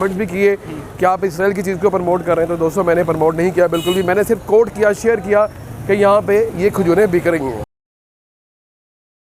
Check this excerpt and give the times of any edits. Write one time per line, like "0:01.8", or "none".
none